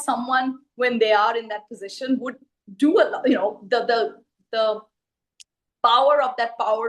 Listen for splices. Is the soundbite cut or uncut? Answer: uncut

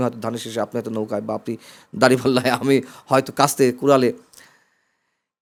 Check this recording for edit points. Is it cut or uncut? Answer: uncut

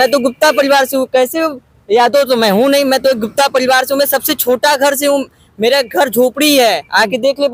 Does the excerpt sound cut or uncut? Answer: uncut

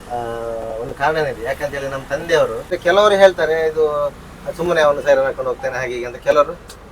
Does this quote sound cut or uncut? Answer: cut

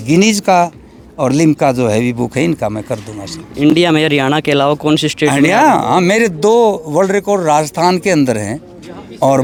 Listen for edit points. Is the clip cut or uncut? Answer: uncut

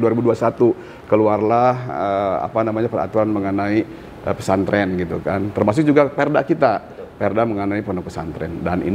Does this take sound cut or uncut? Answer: uncut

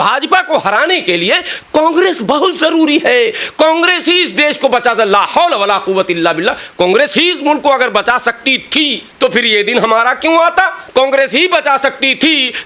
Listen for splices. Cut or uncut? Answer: cut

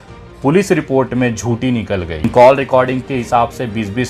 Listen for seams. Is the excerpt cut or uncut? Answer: cut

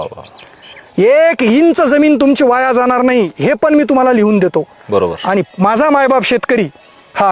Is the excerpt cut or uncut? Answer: uncut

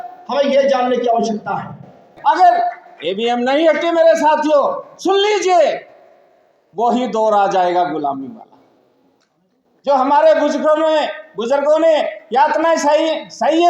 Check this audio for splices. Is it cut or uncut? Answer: cut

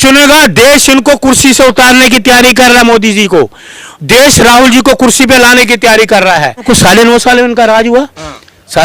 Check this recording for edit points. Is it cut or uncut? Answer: cut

